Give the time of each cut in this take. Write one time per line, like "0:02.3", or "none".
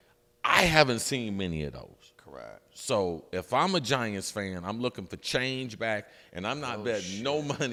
none